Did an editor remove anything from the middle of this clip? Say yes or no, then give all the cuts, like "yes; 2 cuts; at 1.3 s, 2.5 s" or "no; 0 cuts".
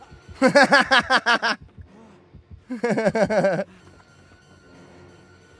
yes; 1 cut; at 3.8 s